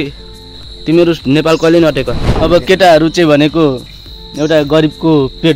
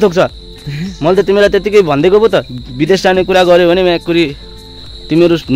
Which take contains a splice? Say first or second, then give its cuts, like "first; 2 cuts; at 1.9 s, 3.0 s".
first; 1 cut; at 2.4 s